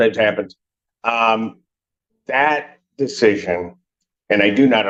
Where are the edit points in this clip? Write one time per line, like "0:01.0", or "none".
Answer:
none

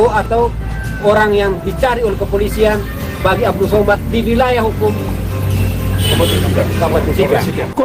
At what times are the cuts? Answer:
none

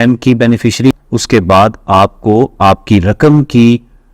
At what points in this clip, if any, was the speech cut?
0:00.9

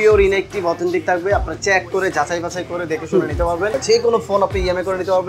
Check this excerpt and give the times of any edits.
0:03.8

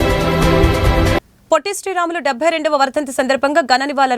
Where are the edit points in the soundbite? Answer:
0:01.0

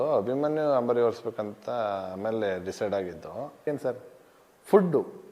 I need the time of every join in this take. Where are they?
0:03.7

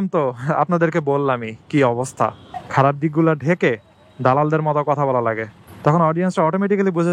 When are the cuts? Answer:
0:02.5

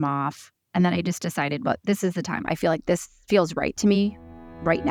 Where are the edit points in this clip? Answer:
none

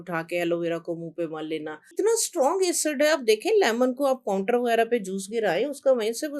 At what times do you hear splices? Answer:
0:02.0

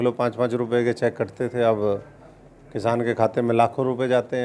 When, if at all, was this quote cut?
none

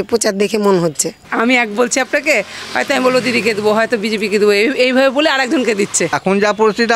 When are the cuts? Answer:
0:01.3
0:06.1

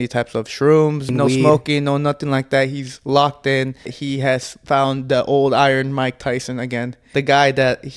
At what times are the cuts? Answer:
0:01.1
0:04.0
0:07.0

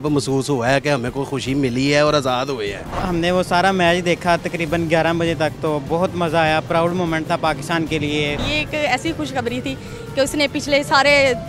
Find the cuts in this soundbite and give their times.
0:03.0
0:08.4

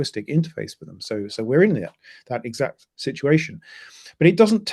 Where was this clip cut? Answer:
none

